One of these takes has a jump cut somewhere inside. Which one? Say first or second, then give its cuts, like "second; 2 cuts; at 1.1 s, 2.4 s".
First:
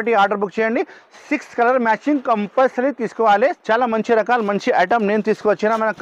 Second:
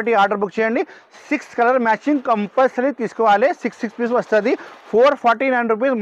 first; 1 cut; at 3.6 s